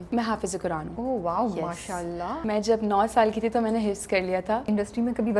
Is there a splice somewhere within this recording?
yes; 3 cuts; at 0.9 s, 2.4 s, 4.6 s

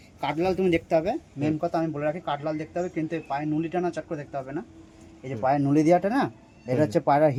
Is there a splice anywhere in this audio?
no; 0 cuts

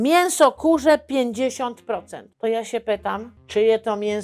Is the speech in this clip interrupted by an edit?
yes; 2 cuts; at 2.2 s, 3.3 s

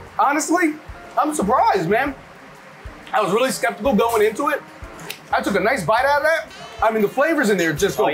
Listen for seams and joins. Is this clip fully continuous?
no; 1 cut; at 0.9 s

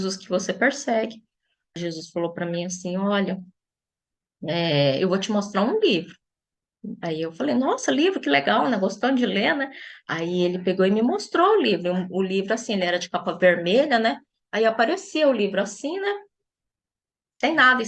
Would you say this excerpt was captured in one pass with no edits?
no; 1 cut; at 1.8 s

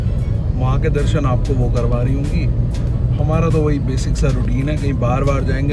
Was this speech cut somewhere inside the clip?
no; 0 cuts

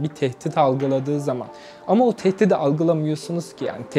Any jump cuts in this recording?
no; 0 cuts

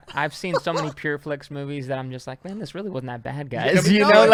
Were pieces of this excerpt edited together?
no; 0 cuts

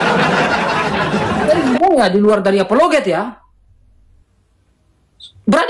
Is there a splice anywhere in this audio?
no; 0 cuts

